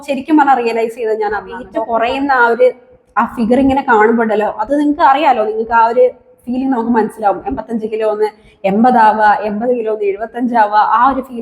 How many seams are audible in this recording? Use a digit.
1